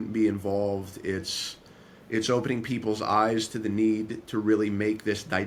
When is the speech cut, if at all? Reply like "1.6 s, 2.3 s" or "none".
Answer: none